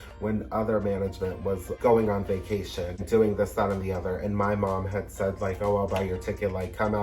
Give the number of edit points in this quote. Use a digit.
2